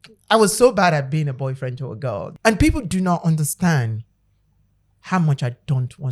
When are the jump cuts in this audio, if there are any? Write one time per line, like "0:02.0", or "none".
0:02.3